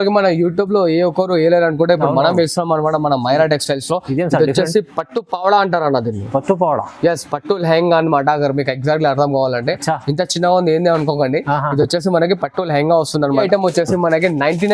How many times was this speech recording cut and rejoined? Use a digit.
1